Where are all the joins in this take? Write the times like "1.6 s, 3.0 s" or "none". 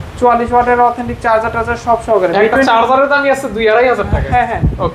none